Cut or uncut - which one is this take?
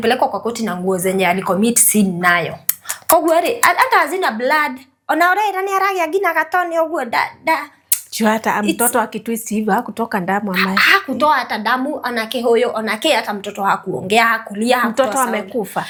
uncut